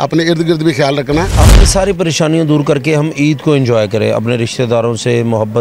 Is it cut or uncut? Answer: cut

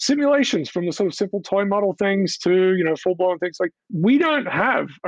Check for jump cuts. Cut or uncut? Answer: uncut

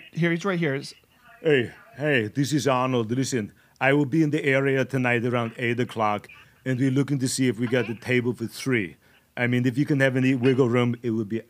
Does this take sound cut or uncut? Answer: uncut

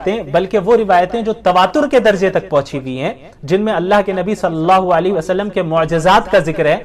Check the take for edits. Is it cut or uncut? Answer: uncut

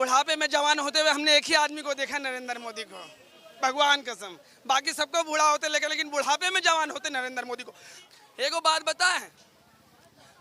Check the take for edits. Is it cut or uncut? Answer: uncut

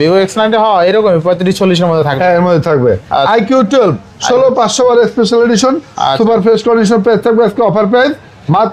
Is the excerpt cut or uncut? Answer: uncut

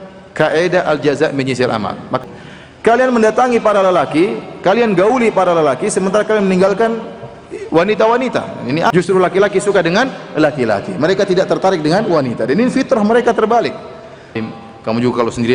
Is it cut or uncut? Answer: cut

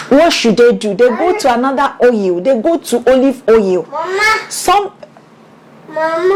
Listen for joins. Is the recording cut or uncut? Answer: uncut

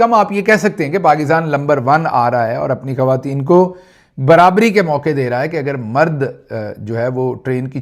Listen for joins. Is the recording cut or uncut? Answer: uncut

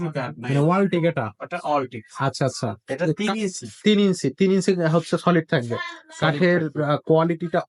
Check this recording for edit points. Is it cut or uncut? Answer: uncut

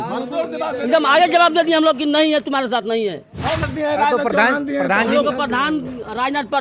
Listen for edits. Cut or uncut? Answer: cut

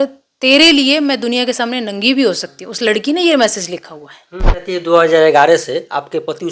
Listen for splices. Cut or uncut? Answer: cut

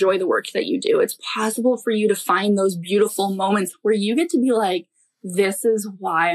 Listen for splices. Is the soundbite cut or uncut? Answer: cut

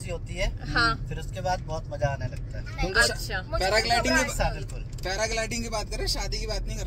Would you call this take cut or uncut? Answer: uncut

